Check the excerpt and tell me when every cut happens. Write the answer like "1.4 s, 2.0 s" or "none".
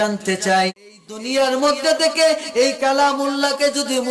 1.1 s